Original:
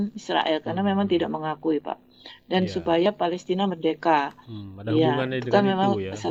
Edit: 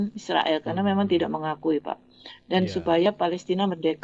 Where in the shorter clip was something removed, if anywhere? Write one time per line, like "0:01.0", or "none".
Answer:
none